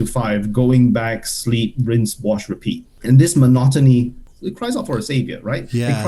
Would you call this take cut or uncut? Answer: cut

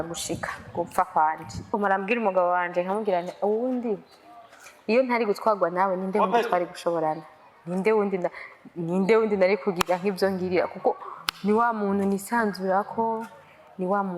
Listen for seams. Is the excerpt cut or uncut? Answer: cut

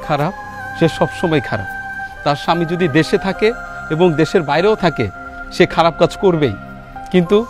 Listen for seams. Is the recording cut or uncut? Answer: uncut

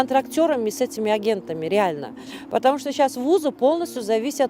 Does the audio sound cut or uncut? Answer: uncut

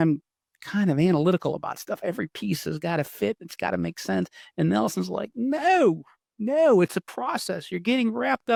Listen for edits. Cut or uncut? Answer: uncut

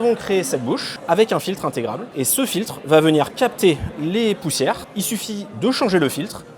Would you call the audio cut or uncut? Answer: cut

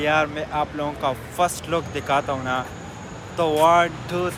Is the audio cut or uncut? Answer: uncut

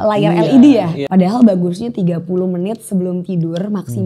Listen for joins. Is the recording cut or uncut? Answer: cut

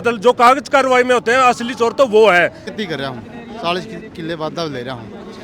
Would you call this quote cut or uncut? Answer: cut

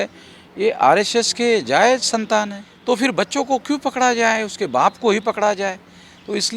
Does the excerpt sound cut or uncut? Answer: cut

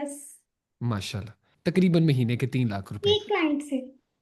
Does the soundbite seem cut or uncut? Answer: cut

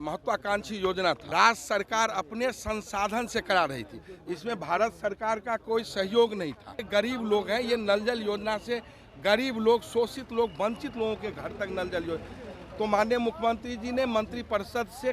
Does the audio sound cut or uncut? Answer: cut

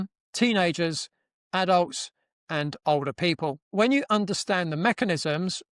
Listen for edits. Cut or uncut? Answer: cut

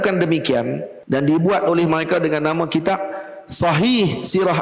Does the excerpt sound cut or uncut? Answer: cut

